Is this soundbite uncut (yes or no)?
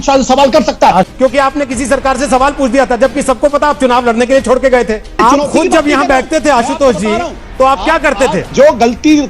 no